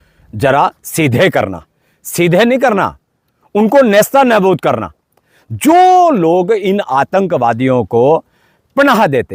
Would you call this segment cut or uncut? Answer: uncut